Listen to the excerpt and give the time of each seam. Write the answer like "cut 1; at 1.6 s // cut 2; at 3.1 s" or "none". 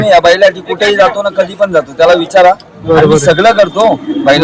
none

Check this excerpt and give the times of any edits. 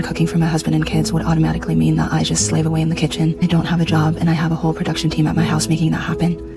none

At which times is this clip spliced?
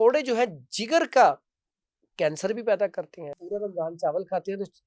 cut 1; at 3.4 s

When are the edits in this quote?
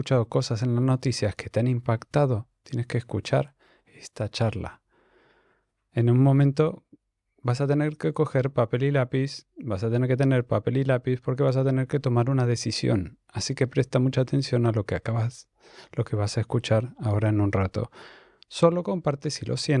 none

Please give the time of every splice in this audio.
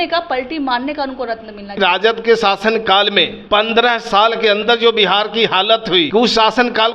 cut 1; at 1.8 s // cut 2; at 3.4 s // cut 3; at 6.1 s

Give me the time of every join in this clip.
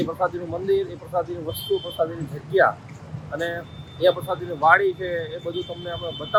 none

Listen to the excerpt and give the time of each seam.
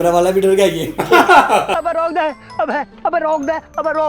cut 1; at 1.7 s

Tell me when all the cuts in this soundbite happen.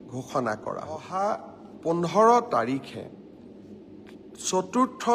cut 1; at 1.1 s

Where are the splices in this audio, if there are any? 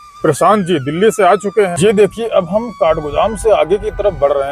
cut 1; at 1.7 s

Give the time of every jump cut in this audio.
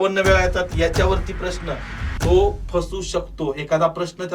cut 1; at 1.9 s

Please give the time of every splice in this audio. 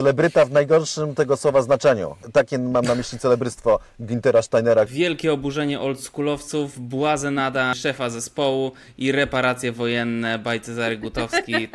cut 1; at 2.2 s // cut 2; at 4.9 s // cut 3; at 7.7 s

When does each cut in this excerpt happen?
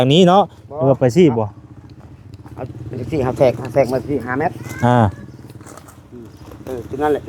none

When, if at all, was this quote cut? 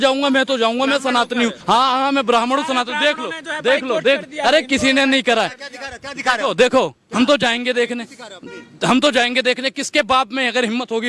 cut 1; at 1.6 s

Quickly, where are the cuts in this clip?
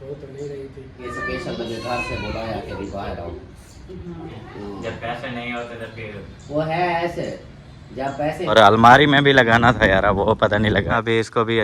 cut 1; at 1.1 s // cut 2; at 4.3 s // cut 3; at 8.5 s // cut 4; at 10.9 s

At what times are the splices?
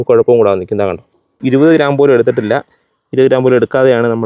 cut 1; at 1.4 s

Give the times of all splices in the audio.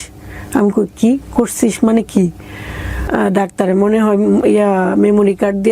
cut 1; at 3.0 s

